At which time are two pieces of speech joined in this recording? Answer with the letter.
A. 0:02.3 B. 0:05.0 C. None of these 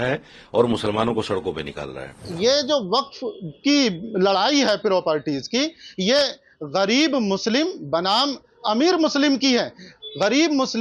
A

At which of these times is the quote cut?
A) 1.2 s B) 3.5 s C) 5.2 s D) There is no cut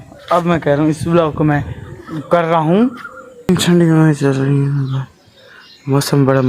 B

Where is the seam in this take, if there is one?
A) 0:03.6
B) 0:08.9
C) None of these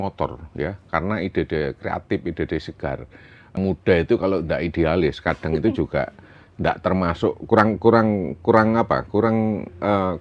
A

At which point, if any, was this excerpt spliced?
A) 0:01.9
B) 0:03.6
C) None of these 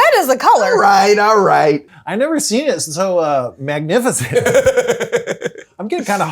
A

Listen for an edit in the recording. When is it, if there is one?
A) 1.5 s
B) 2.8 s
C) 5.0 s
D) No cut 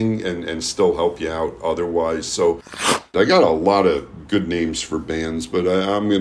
B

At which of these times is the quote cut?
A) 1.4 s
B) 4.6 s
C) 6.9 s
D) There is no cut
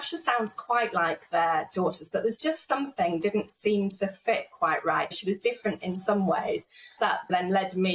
C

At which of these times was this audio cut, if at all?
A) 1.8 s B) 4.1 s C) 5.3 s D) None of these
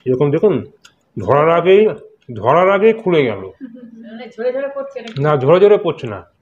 D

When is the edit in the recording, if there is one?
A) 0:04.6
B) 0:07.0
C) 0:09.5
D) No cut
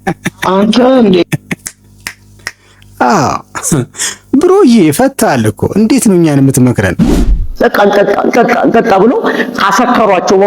B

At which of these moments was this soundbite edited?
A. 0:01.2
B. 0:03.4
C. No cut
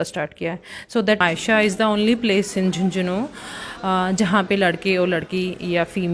A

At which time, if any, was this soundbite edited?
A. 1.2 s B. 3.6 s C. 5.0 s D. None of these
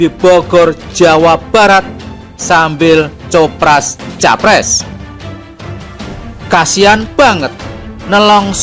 D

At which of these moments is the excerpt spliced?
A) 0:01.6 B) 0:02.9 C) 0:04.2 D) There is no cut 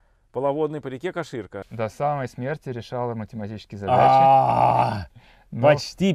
A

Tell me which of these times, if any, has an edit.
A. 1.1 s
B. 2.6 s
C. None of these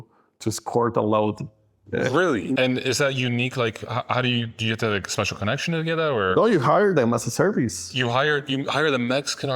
B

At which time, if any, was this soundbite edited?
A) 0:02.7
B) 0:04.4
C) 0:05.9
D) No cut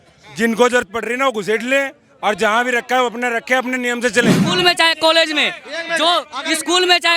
B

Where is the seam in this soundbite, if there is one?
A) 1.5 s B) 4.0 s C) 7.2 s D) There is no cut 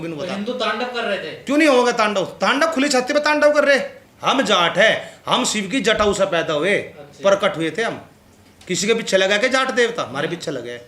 B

